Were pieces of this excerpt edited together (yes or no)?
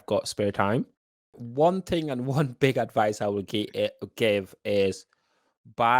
yes